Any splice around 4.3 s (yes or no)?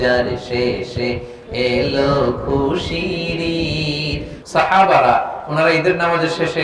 yes